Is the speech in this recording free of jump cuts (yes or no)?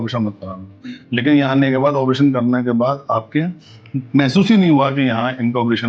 yes